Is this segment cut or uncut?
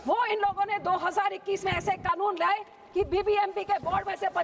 uncut